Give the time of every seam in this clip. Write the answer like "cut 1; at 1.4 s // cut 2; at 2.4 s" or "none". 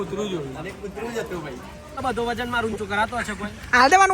cut 1; at 2.0 s